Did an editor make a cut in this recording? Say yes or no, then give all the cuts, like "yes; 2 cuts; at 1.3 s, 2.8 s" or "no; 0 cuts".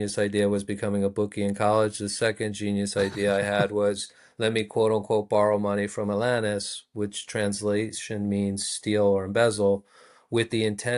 no; 0 cuts